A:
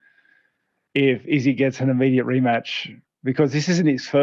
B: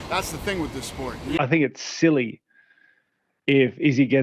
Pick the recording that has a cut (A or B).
B